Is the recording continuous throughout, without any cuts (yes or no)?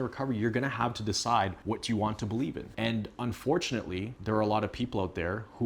no